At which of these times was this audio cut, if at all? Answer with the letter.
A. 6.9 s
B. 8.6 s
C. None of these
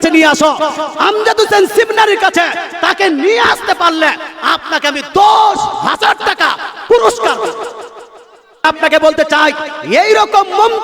B